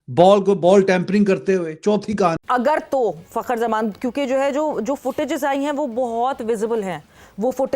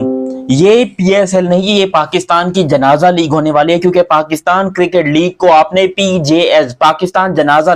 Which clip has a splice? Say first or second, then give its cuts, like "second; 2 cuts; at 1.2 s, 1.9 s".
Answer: first; 1 cut; at 2.4 s